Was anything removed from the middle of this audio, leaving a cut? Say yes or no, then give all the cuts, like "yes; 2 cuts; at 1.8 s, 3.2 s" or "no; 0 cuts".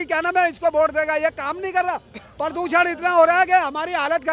no; 0 cuts